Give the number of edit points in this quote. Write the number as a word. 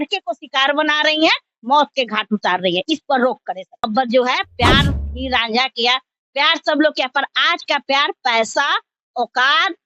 one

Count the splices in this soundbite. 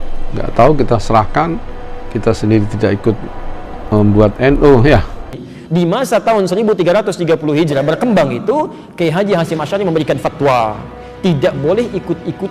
one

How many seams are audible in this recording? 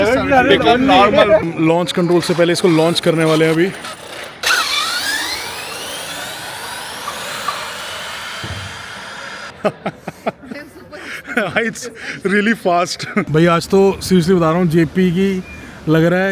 two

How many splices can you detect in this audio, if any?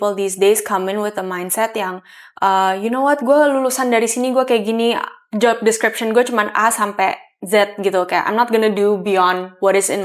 zero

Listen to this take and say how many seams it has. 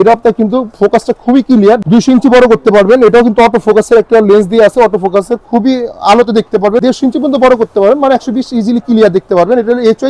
two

